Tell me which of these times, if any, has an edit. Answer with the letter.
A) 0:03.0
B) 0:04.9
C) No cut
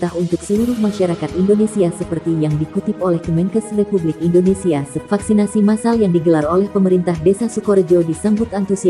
B